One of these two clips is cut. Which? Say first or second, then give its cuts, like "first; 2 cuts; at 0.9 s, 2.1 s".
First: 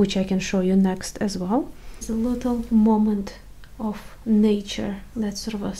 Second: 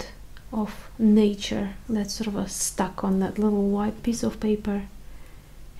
first; 1 cut; at 2.0 s